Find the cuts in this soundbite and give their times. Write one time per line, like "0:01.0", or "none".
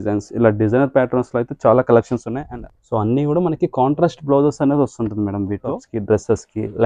0:02.4
0:05.8